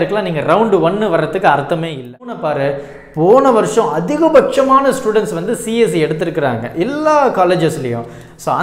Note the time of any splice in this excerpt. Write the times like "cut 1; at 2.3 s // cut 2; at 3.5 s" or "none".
cut 1; at 2.4 s